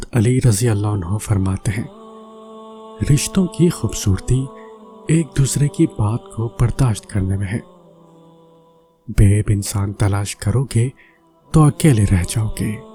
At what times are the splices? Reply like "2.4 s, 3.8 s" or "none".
none